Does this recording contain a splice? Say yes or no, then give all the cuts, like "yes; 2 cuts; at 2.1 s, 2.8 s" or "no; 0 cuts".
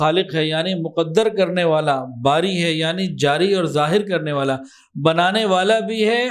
no; 0 cuts